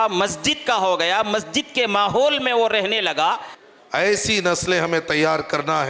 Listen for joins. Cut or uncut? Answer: cut